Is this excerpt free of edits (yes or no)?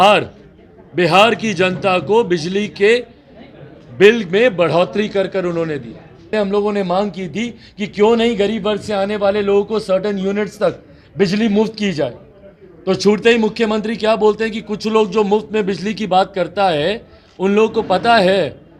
no